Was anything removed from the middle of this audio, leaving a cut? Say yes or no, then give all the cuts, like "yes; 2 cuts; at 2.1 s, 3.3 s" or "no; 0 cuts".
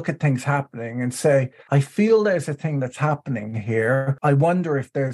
yes; 2 cuts; at 1.6 s, 4.1 s